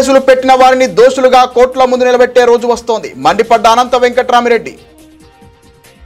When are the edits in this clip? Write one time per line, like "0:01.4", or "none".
0:04.8